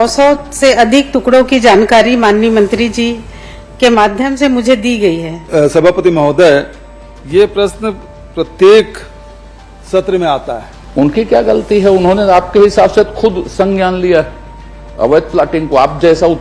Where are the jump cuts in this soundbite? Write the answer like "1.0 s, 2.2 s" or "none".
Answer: 5.4 s, 10.7 s